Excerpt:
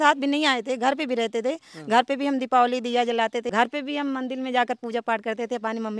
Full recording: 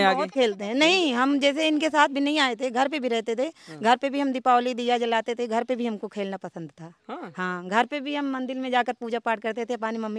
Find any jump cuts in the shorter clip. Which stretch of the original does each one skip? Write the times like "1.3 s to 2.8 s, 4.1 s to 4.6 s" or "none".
5.4 s to 7.7 s